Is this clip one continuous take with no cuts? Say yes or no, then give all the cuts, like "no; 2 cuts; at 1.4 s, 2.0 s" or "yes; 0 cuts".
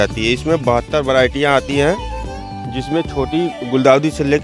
yes; 0 cuts